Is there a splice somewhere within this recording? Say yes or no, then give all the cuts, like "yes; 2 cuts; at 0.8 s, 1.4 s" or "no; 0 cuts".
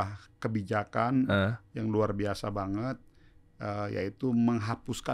no; 0 cuts